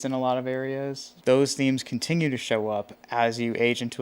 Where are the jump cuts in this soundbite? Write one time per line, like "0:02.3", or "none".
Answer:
0:01.1